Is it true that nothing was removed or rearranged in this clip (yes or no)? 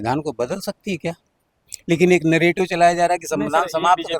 yes